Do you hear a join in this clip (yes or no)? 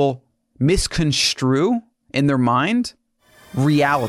no